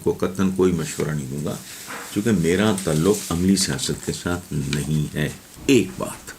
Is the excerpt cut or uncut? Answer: cut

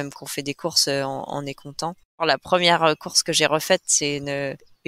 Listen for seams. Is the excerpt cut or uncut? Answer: cut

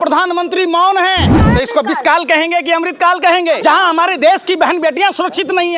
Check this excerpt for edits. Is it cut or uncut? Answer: cut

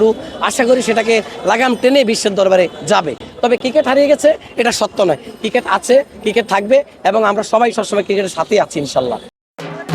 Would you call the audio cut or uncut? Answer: uncut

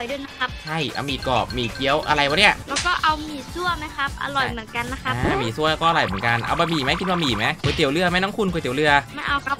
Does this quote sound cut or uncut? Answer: uncut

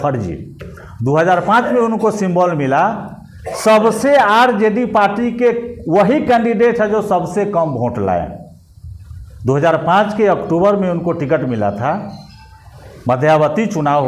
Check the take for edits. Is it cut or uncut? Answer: uncut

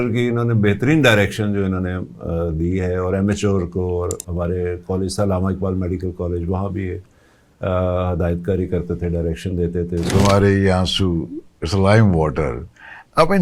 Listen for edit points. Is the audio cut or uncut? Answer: cut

